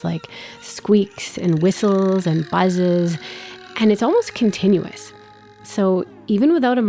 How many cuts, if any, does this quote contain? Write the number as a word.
zero